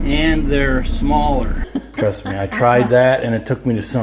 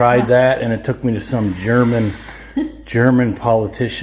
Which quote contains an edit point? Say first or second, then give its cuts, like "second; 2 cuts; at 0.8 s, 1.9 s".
first; 1 cut; at 1.6 s